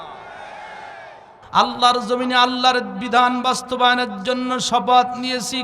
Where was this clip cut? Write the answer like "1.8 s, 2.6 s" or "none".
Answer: 1.3 s